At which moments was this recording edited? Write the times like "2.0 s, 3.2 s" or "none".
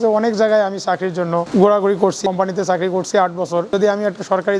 1.5 s, 2.2 s, 3.7 s